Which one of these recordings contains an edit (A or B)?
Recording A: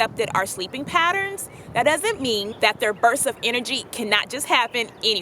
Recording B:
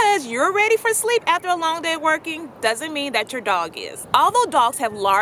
A